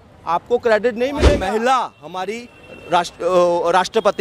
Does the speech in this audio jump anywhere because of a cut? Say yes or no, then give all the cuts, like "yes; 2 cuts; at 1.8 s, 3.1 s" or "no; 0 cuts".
yes; 1 cut; at 1.3 s